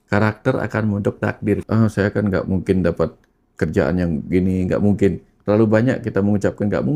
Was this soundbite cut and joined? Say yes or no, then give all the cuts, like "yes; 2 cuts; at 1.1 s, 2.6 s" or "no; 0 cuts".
yes; 1 cut; at 1.6 s